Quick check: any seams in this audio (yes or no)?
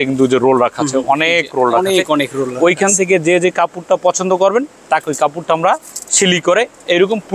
no